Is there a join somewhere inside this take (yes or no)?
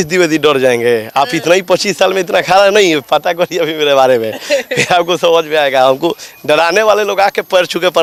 no